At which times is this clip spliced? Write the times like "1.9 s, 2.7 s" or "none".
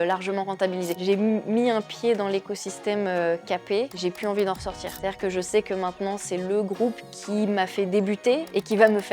1.0 s